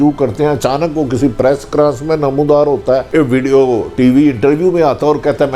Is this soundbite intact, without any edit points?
no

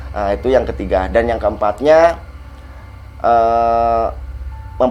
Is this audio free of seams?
yes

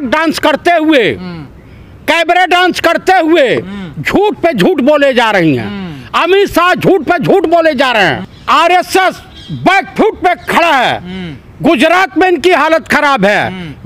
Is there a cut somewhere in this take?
no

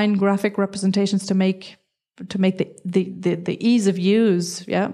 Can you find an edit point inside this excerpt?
no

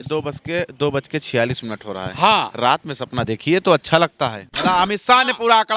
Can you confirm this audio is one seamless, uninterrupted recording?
no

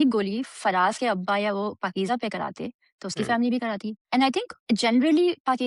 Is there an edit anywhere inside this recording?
no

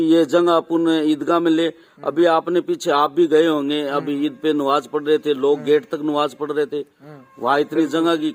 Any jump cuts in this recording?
no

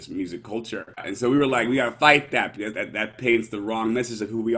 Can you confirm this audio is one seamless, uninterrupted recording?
no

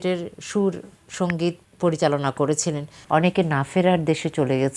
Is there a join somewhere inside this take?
yes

